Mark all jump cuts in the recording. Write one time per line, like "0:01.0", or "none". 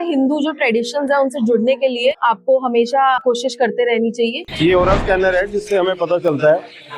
0:02.2
0:03.2
0:04.4